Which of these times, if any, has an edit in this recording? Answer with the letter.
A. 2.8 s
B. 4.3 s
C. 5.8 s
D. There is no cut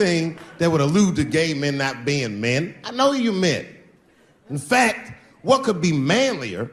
D